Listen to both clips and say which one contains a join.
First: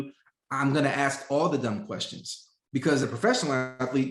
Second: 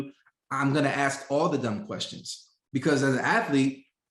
first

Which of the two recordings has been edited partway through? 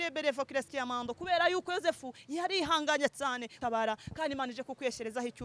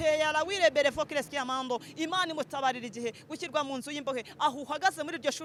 first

